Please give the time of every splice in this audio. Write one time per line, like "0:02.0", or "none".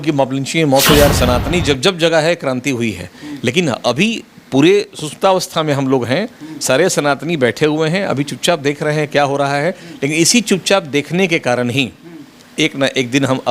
0:01.1